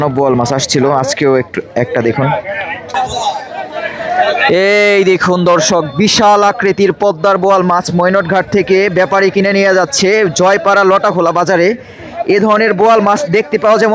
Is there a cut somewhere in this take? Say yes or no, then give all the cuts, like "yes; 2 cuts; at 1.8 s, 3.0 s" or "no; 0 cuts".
yes; 1 cut; at 2.9 s